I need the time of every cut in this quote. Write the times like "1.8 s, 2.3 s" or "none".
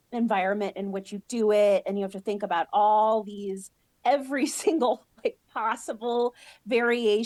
none